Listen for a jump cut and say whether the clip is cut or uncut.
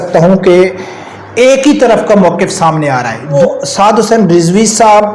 cut